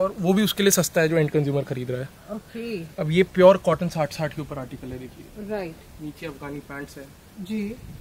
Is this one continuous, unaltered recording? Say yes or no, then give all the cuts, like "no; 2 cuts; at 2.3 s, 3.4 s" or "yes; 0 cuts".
yes; 0 cuts